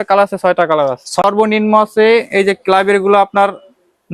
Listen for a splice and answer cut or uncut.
cut